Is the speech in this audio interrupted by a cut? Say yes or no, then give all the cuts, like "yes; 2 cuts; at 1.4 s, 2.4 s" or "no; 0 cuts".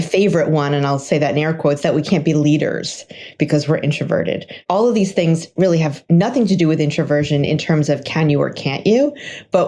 yes; 1 cut; at 4.6 s